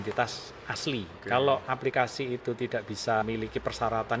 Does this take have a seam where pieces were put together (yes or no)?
yes